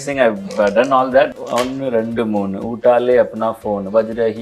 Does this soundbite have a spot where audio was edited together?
yes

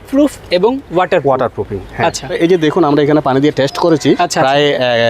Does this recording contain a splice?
yes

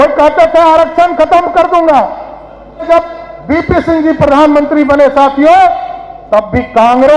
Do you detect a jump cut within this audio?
yes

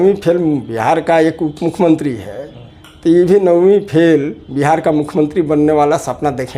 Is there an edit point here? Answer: no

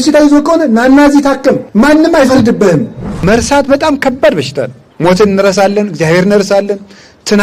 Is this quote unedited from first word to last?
no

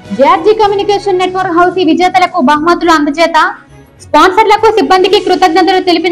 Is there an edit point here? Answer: no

